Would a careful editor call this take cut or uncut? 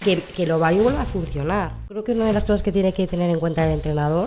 cut